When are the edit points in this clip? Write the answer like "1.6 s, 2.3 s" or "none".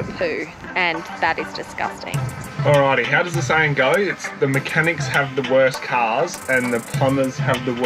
2.4 s

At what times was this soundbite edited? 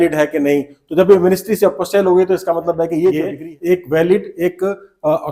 none

